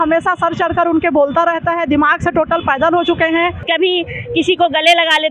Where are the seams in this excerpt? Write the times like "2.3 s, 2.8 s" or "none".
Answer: 3.7 s